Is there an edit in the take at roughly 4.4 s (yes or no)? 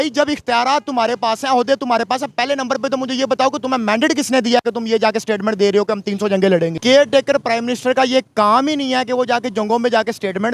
no